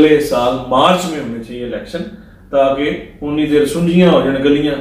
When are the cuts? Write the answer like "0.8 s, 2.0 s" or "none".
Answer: none